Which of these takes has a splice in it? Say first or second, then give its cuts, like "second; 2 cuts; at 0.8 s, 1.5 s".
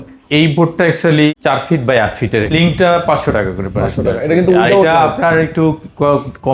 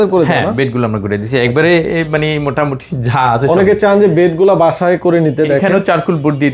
first; 2 cuts; at 1.3 s, 2.5 s